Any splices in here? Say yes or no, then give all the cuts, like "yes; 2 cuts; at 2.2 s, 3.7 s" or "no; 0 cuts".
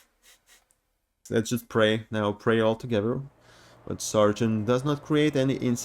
yes; 1 cut; at 1.2 s